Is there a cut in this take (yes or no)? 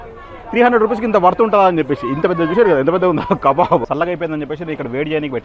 yes